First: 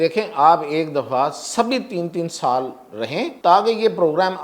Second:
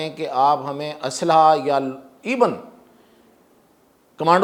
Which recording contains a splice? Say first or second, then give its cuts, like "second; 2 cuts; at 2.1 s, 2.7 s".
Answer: first; 1 cut; at 3.3 s